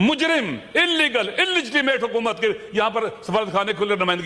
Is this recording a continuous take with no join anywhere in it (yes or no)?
yes